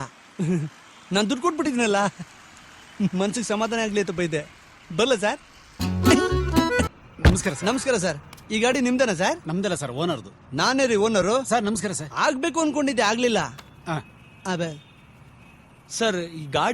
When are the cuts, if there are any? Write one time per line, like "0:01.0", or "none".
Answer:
0:06.9